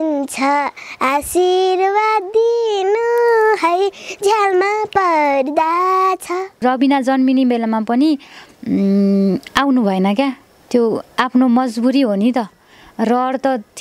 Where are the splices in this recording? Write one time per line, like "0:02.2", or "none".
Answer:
0:06.6